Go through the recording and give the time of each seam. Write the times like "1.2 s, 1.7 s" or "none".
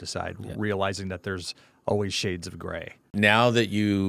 3.1 s